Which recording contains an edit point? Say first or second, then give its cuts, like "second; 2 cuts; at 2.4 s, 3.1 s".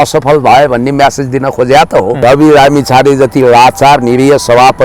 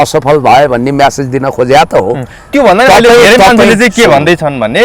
first; 1 cut; at 2.2 s